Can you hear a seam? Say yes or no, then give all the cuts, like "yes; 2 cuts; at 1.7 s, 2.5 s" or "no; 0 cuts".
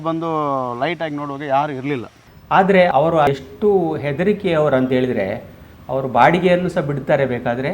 yes; 2 cuts; at 2.2 s, 2.9 s